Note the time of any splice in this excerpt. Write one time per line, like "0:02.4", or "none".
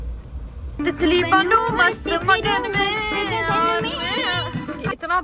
none

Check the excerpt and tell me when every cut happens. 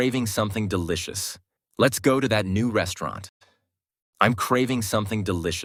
none

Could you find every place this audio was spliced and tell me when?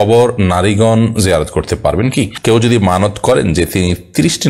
0:02.3

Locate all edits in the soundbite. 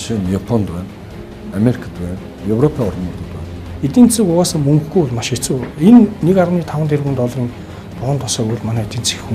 0:03.7

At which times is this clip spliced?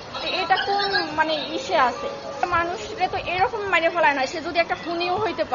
0:02.3

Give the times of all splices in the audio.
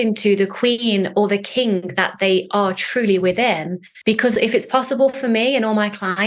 0:04.3

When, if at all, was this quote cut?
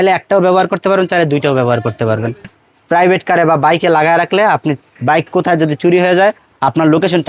0:02.5

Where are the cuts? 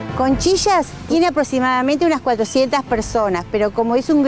0:01.0

